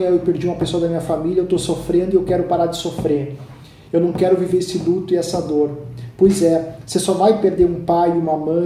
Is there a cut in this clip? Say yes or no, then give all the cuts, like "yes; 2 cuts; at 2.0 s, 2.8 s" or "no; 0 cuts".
no; 0 cuts